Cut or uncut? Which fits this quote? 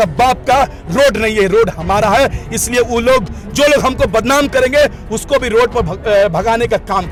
uncut